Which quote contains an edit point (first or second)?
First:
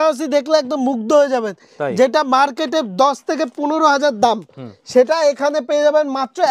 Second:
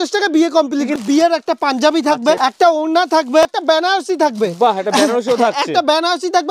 second